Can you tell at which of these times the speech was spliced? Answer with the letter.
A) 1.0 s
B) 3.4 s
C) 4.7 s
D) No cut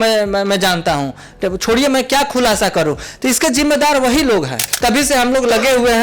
C